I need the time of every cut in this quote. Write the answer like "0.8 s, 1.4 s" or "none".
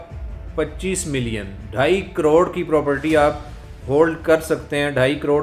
none